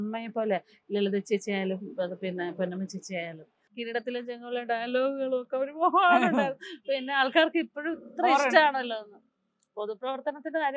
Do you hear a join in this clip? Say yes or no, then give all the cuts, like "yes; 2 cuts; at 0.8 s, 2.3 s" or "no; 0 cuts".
yes; 1 cut; at 3.7 s